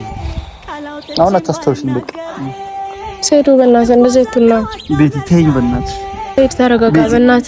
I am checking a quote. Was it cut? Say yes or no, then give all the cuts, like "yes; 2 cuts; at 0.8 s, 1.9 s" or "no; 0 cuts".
yes; 1 cut; at 6.2 s